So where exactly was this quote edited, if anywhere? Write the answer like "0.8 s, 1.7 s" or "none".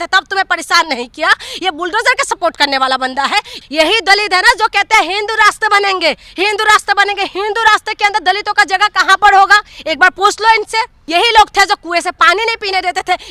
3.6 s, 11.0 s